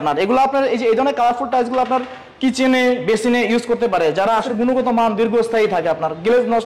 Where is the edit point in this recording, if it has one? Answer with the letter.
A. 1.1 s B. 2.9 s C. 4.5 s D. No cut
C